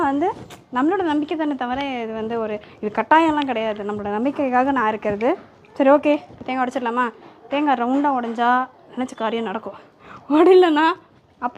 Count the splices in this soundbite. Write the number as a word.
zero